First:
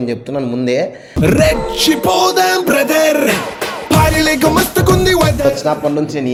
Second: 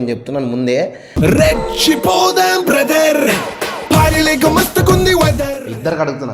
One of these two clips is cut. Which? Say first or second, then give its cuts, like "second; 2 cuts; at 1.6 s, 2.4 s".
second; 1 cut; at 5.4 s